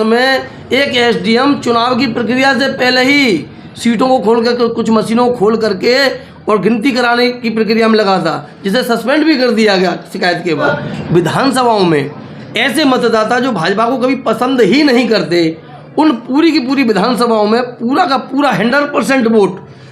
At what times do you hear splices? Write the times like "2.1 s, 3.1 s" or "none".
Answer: 10.7 s

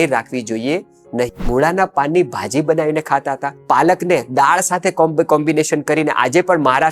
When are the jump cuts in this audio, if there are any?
1.4 s, 3.5 s

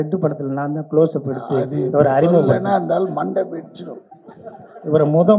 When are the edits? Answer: none

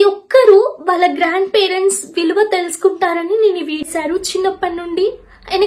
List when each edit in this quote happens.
3.9 s

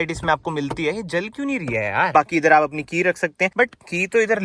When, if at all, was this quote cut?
2.1 s, 3.5 s

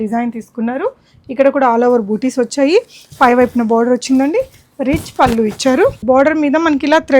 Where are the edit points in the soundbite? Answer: 6.0 s

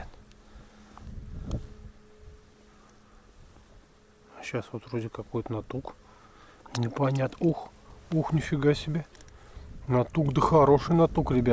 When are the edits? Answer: none

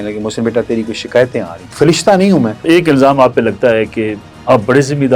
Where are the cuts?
1.6 s, 2.6 s

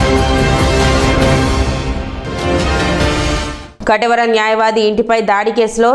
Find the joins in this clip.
3.6 s

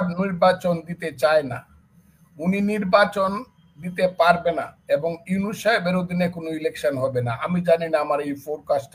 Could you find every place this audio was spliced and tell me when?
none

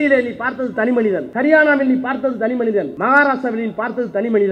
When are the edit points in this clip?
1.3 s, 2.9 s

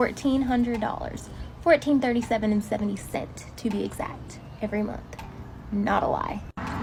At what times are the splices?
none

